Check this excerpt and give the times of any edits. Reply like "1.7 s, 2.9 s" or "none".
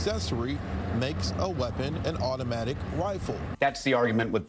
3.5 s